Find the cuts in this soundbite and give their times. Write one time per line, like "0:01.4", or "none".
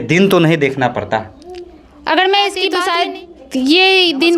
0:02.8